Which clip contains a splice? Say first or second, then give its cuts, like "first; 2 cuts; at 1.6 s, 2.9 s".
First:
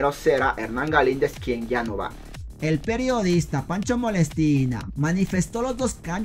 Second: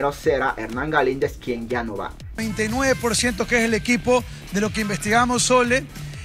second; 1 cut; at 2.2 s